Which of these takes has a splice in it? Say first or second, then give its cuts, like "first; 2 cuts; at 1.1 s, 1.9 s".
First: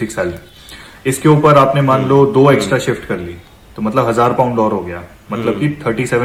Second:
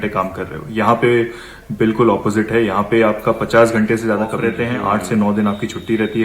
second; 1 cut; at 4.5 s